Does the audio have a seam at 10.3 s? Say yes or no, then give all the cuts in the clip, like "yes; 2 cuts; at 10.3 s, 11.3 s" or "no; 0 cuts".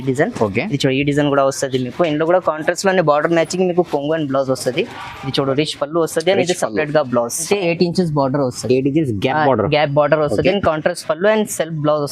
no; 1 cut; at 7.4 s